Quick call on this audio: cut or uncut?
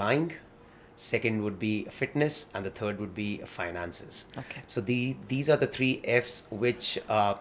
uncut